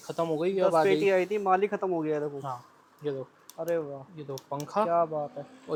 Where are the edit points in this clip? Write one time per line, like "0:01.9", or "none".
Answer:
none